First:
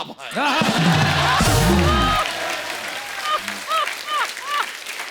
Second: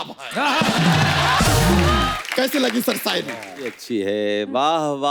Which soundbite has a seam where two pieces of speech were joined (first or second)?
second